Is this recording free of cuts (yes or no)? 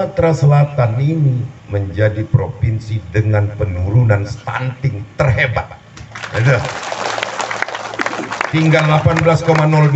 no